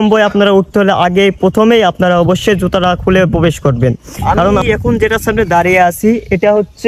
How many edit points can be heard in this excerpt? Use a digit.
1